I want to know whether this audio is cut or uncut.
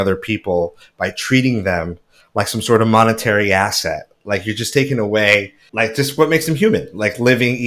cut